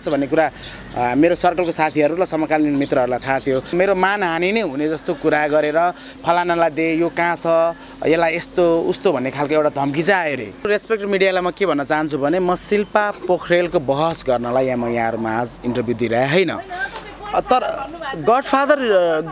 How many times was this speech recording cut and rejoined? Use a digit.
2